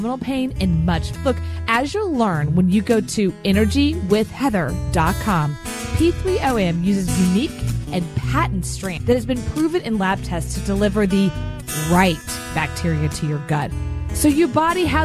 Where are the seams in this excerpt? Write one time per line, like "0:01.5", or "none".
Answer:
0:01.1
0:09.0